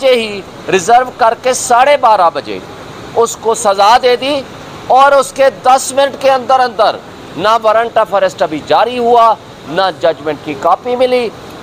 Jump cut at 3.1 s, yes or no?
no